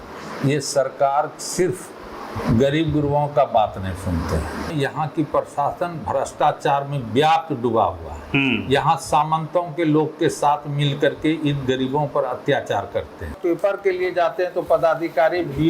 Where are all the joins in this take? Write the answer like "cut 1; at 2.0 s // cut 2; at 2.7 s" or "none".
cut 1; at 4.7 s // cut 2; at 13.4 s